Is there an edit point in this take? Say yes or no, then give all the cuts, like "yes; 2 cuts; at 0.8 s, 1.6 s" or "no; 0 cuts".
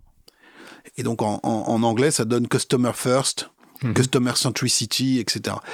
no; 0 cuts